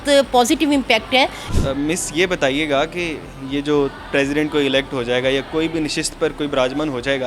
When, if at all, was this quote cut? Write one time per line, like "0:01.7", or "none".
0:01.4